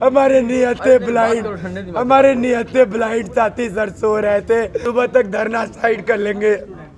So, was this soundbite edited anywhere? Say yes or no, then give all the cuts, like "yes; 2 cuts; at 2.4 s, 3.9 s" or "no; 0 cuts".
yes; 1 cut; at 4.8 s